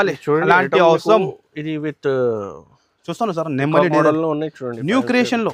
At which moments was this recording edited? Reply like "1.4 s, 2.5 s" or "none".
none